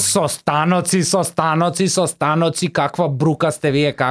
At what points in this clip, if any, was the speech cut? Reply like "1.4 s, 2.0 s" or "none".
none